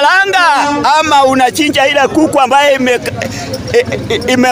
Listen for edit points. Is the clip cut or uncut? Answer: uncut